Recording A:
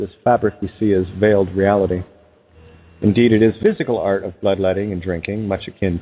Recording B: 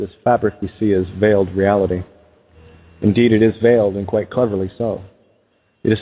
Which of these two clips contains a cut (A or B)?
B